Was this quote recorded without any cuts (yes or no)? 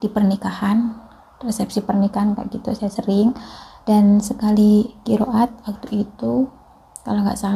yes